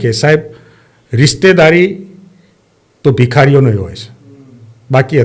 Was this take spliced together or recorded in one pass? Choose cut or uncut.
uncut